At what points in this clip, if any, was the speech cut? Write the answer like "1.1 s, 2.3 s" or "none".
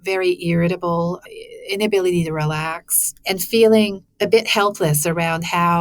4.0 s